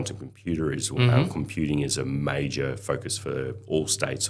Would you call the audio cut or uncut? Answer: uncut